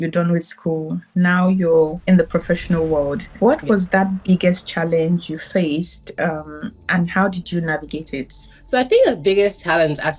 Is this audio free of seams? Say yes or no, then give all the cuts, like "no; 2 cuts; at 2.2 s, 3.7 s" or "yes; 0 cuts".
no; 3 cuts; at 2.0 s, 3.2 s, 8.5 s